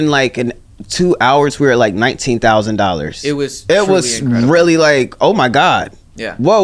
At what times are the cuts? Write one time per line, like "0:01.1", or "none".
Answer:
none